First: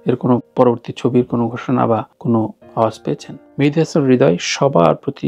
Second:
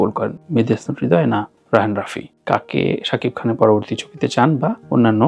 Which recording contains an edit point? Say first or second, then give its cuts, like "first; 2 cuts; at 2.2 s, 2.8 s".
first; 1 cut; at 3.4 s